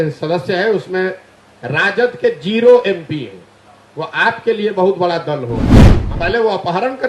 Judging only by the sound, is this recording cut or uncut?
cut